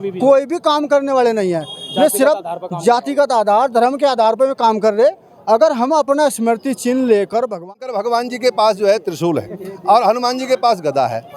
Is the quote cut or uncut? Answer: cut